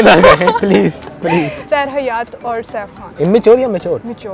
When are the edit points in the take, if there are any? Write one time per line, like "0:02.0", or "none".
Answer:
0:01.6
0:03.0